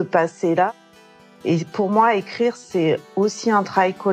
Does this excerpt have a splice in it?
yes; 1 cut; at 1.2 s

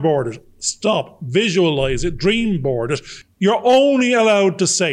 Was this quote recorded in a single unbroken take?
no; 1 cut; at 3.1 s

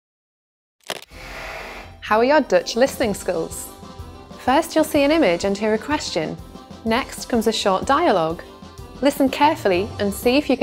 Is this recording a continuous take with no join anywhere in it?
no; 1 cut; at 2.0 s

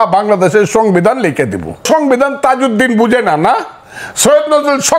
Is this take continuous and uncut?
no; 1 cut; at 1.8 s

